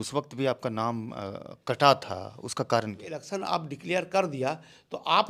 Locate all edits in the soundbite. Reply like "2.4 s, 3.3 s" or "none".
3.2 s